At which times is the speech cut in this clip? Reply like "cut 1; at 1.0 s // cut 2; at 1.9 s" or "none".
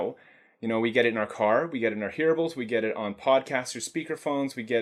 none